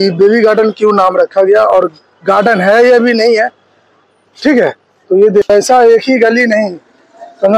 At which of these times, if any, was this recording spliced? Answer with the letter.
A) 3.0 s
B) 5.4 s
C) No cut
B